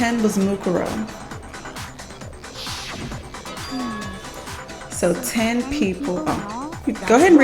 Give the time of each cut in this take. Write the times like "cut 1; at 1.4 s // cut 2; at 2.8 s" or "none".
none